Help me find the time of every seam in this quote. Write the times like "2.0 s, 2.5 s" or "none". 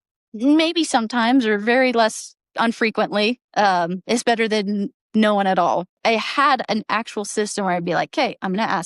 6.0 s